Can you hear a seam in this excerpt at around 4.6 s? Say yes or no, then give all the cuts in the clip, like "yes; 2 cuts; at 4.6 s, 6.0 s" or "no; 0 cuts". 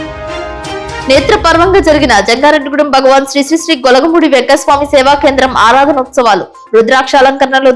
no; 1 cut; at 0.9 s